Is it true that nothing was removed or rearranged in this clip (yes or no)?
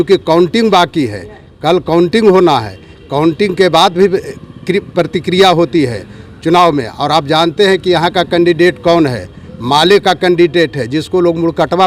yes